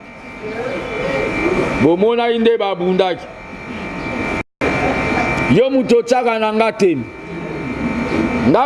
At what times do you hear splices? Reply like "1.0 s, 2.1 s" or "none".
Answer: 4.6 s